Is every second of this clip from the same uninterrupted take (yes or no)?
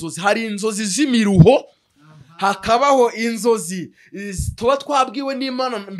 yes